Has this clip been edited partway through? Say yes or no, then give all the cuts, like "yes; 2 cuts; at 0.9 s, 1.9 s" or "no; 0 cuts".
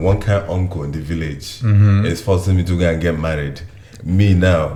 no; 0 cuts